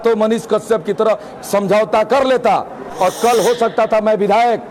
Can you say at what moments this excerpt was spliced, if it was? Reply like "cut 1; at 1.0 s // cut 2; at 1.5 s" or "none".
none